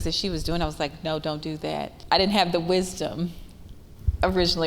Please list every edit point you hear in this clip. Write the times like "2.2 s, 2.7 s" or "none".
1.9 s